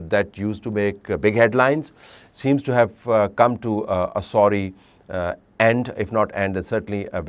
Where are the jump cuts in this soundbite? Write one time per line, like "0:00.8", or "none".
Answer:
none